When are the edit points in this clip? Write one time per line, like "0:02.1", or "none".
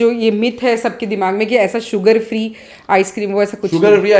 none